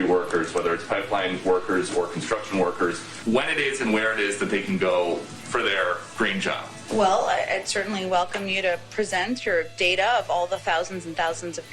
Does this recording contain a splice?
yes; 2 cuts; at 3.1 s, 6.7 s

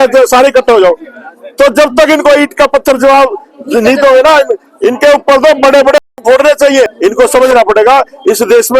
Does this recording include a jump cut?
yes; 1 cut; at 6.9 s

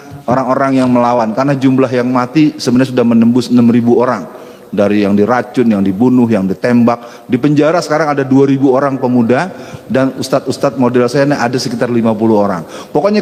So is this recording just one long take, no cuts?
yes; 0 cuts

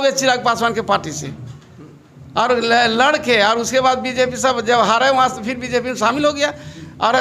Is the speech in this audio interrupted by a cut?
no; 0 cuts

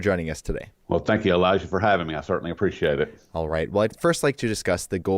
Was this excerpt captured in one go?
no; 1 cut; at 3.2 s

